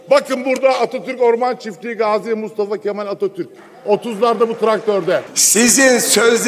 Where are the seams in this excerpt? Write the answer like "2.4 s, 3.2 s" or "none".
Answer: 5.4 s